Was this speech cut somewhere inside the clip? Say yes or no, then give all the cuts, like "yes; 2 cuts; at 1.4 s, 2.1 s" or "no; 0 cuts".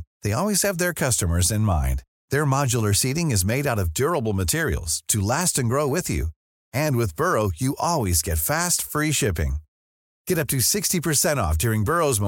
no; 0 cuts